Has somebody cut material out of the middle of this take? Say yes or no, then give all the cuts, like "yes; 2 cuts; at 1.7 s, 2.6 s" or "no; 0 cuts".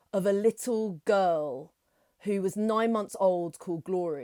no; 0 cuts